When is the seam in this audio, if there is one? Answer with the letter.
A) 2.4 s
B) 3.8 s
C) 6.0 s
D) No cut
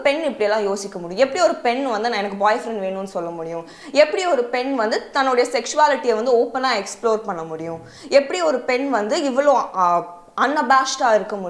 D